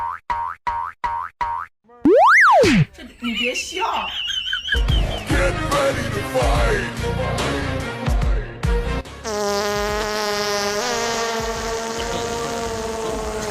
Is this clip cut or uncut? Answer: cut